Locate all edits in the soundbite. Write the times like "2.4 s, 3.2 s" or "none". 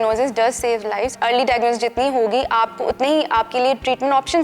1.1 s